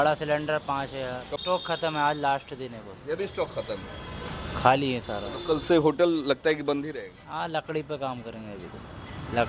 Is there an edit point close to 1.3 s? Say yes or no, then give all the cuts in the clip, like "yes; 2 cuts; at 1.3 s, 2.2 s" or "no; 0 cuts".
yes; 1 cut; at 1.3 s